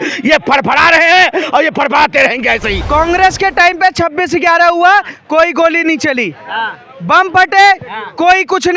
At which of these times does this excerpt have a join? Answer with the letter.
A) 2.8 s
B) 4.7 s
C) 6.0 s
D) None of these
A